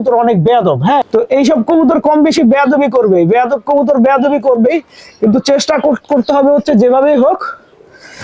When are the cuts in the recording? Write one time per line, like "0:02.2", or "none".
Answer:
none